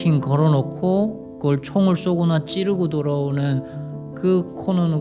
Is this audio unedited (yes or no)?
yes